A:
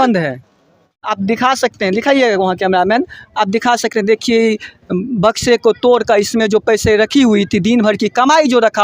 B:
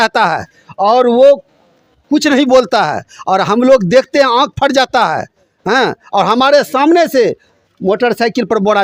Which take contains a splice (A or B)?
A